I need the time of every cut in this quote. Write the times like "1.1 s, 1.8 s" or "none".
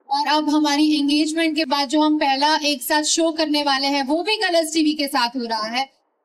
none